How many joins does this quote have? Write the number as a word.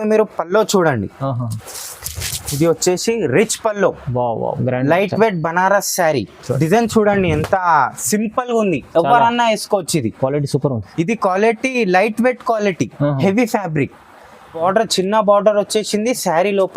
two